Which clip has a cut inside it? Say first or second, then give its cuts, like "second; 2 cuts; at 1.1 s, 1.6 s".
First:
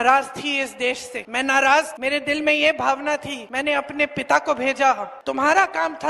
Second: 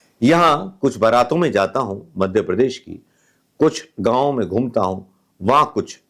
first; 4 cuts; at 1.1 s, 1.9 s, 3.4 s, 5.1 s